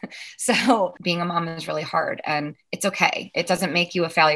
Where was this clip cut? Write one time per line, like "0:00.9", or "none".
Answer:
0:01.0